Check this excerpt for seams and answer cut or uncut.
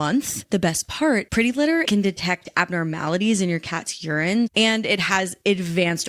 cut